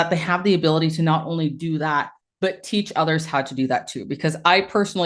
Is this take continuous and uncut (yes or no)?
yes